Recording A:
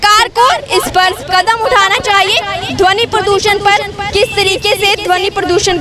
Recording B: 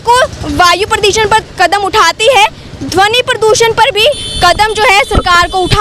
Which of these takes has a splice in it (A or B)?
B